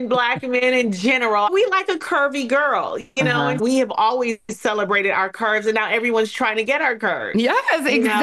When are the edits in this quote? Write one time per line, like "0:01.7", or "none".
0:01.5
0:03.6

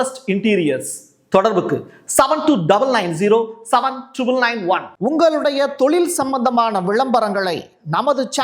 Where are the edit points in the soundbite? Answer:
0:04.9

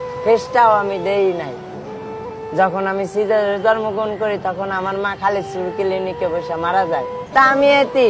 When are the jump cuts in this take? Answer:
0:07.2

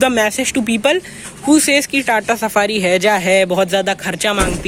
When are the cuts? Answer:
none

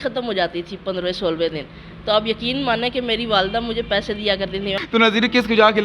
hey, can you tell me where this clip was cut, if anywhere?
0:04.7

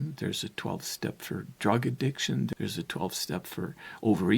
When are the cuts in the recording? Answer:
0:02.5

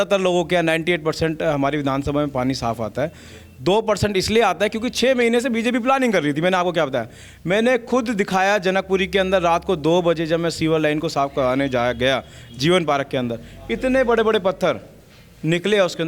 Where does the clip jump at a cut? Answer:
none

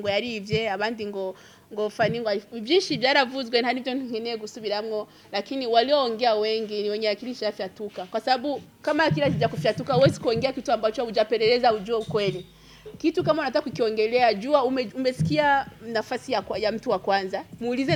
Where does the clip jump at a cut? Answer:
none

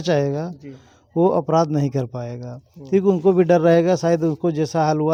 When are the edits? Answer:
none

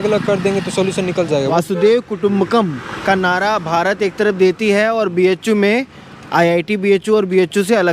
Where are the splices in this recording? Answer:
0:01.5

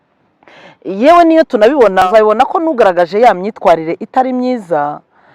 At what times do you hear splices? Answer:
0:02.0

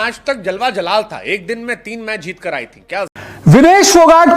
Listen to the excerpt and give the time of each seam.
0:03.1

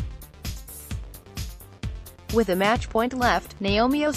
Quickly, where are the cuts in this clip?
0:00.9
0:02.4

